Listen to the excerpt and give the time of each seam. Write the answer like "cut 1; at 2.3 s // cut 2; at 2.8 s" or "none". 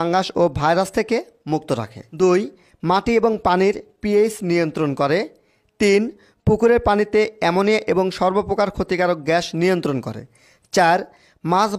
cut 1; at 2.0 s